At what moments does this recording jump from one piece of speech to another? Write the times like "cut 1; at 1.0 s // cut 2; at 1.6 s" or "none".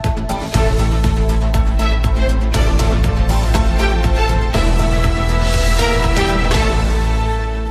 none